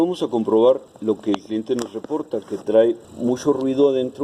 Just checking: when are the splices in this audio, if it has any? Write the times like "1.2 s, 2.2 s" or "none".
0.9 s, 3.1 s